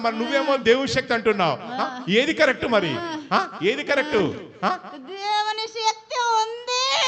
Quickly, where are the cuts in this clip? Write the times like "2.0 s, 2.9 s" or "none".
none